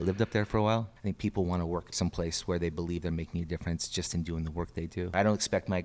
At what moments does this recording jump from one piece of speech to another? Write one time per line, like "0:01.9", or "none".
0:00.9
0:01.9
0:05.1